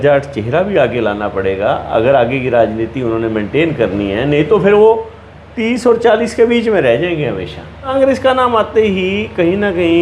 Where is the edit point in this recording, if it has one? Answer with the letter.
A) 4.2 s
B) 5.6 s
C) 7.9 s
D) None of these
C